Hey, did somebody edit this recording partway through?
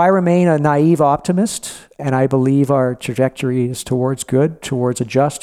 yes; 1 cut; at 1.9 s

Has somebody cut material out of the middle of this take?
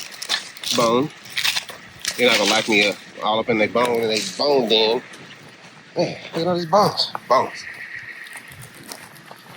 no; 0 cuts

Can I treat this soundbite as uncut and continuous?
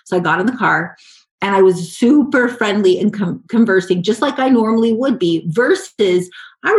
yes; 0 cuts

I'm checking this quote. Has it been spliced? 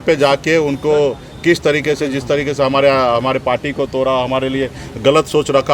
no; 0 cuts

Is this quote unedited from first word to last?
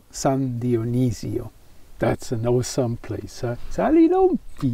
yes; 0 cuts

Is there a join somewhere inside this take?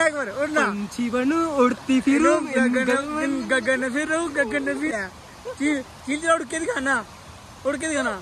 yes; 1 cut; at 4.9 s

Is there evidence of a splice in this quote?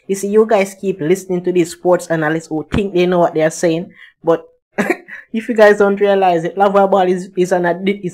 no; 0 cuts

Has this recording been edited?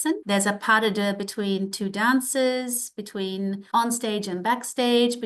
no; 0 cuts

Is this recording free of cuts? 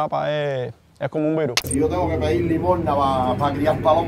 no; 1 cut; at 1.7 s

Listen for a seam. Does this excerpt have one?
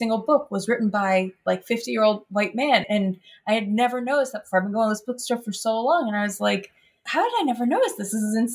yes; 1 cut; at 7.1 s

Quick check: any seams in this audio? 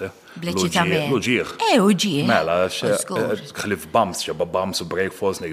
no; 0 cuts

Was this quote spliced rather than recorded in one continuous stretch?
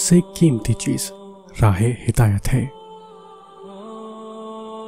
yes; 1 cut; at 2.8 s

